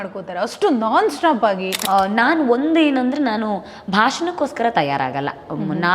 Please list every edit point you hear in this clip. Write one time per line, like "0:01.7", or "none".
0:01.7